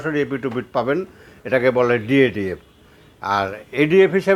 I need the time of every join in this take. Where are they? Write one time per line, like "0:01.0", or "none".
none